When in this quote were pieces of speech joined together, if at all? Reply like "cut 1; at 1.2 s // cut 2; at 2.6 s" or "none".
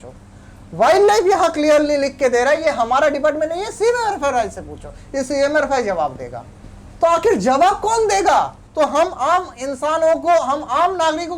cut 1; at 8.6 s